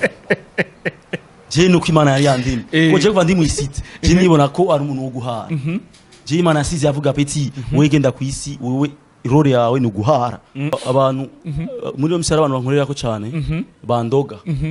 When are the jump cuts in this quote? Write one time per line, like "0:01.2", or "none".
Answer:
0:10.7